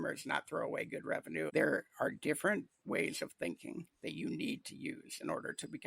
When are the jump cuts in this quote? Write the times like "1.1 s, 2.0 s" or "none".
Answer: 1.5 s